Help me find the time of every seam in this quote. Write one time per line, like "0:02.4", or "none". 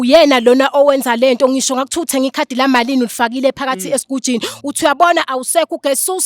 none